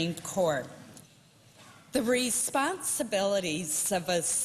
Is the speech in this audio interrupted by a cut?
yes; 1 cut; at 3.1 s

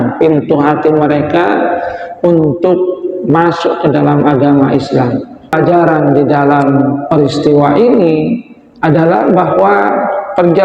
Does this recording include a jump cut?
yes; 1 cut; at 5.5 s

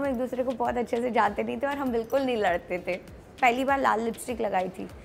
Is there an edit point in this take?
yes; 1 cut; at 3.4 s

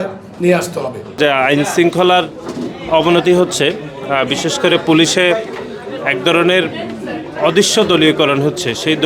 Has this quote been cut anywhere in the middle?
no; 0 cuts

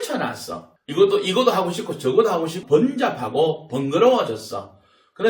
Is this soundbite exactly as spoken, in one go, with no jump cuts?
no; 1 cut; at 2.6 s

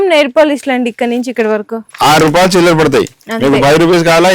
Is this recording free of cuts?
no; 1 cut; at 1.8 s

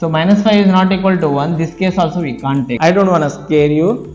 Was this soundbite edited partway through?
yes; 1 cut; at 2.7 s

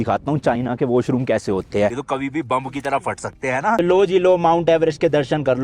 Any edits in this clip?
yes; 2 cuts; at 2.0 s, 3.8 s

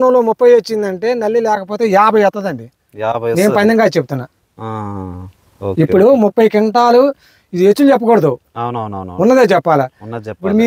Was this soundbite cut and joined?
no; 0 cuts

